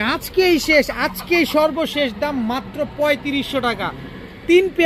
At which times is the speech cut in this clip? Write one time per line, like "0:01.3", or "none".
none